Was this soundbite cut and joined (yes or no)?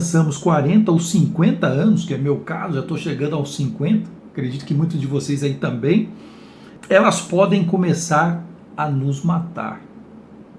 no